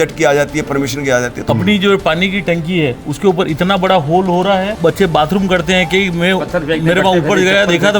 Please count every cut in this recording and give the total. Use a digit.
2